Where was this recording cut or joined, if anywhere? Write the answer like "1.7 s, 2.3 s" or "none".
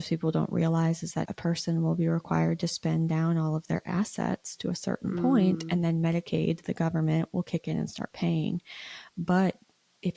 1.2 s